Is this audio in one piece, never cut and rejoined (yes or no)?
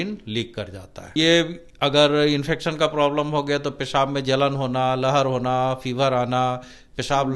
no